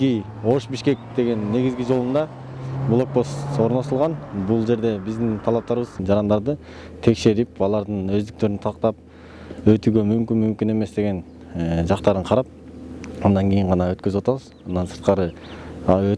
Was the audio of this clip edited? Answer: yes; 1 cut; at 6.0 s

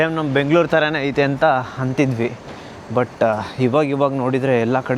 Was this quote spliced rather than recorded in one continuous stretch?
no; 0 cuts

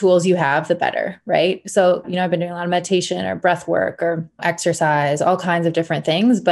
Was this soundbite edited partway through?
yes; 2 cuts; at 2.0 s, 4.4 s

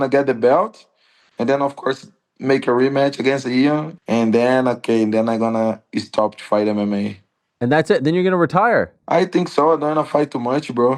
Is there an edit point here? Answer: yes; 2 cuts; at 3.9 s, 9.0 s

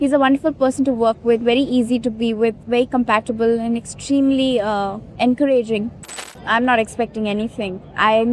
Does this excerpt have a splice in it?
yes; 3 cuts; at 2.6 s, 5.0 s, 6.1 s

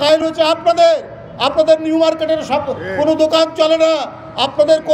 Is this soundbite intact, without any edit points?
yes; 0 cuts

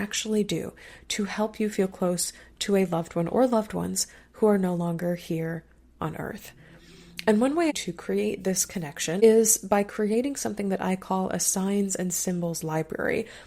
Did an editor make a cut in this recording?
yes; 2 cuts; at 7.7 s, 9.2 s

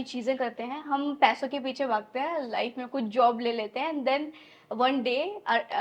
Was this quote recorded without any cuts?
yes; 0 cuts

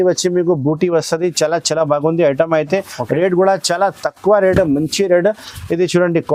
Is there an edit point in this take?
no; 0 cuts

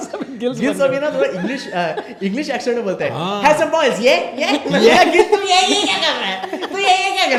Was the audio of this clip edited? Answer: no; 0 cuts

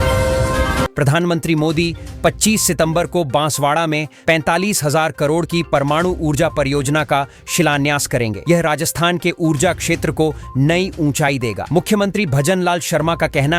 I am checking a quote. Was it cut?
yes; 1 cut; at 0.9 s

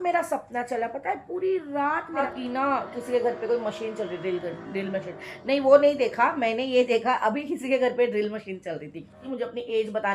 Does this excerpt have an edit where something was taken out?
yes; 2 cuts; at 2.2 s, 9.2 s

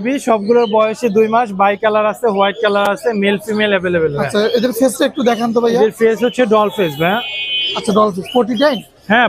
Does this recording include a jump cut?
no; 0 cuts

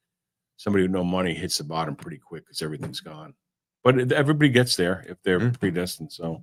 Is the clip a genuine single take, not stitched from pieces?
yes; 0 cuts

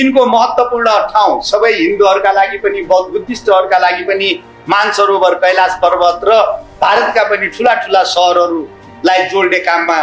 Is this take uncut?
yes; 0 cuts

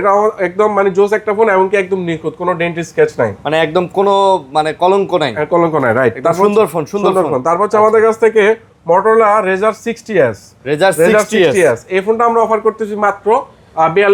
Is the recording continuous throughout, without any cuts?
yes; 0 cuts

